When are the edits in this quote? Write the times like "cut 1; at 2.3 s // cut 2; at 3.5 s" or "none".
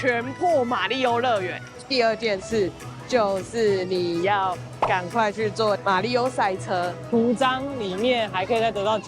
cut 1; at 1.8 s // cut 2; at 7.0 s